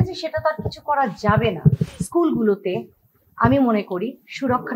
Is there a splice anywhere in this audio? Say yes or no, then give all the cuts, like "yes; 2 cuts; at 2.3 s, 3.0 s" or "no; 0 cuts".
yes; 1 cut; at 1.9 s